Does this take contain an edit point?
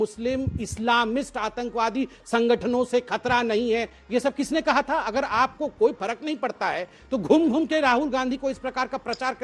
no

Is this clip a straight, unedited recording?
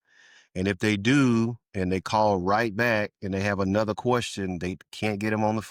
yes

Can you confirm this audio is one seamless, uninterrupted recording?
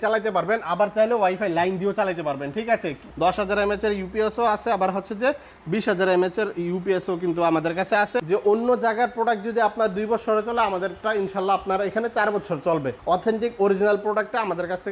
no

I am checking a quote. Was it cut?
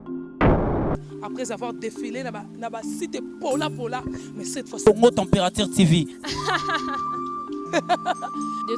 no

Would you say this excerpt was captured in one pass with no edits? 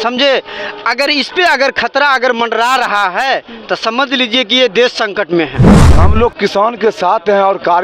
no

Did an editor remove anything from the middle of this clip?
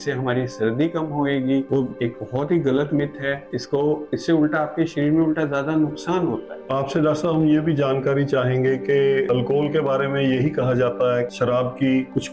no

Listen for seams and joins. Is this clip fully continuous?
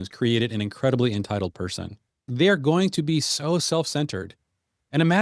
no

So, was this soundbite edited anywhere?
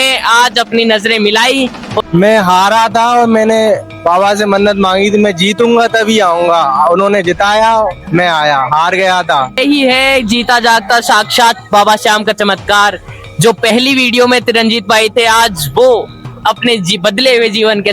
yes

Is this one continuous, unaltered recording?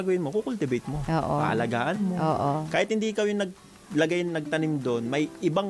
yes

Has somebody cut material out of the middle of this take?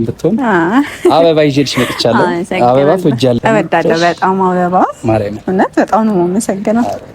yes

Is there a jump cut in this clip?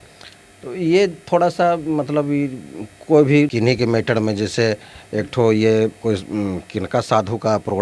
yes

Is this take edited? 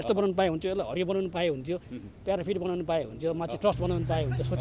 no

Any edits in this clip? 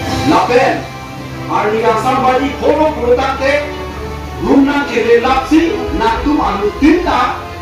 no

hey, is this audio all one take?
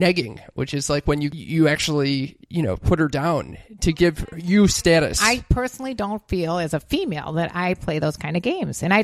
no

